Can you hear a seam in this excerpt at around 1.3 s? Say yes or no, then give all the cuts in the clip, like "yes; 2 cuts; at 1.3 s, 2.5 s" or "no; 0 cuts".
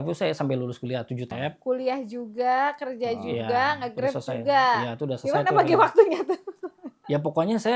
yes; 1 cut; at 1.3 s